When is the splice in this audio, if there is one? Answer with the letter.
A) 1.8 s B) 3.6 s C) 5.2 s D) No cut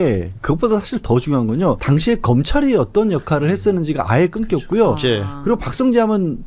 A